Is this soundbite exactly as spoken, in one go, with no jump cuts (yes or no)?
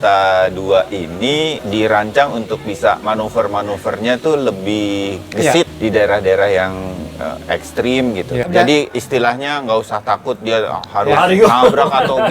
no